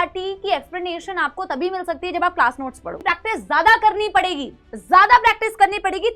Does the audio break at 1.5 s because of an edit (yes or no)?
no